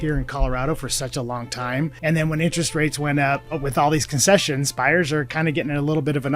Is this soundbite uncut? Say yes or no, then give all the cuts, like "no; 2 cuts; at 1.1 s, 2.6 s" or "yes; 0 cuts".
no; 3 cuts; at 2.0 s, 3.5 s, 5.3 s